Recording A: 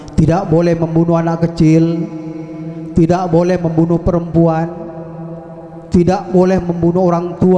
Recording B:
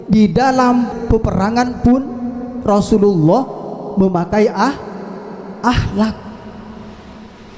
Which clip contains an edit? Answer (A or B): B